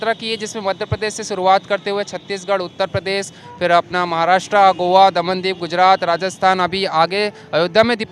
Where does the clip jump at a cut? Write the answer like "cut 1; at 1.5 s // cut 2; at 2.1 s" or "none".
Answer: none